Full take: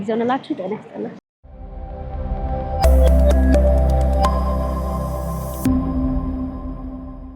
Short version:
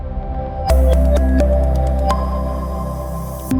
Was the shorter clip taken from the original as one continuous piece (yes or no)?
yes